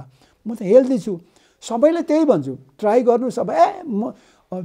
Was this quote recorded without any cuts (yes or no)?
yes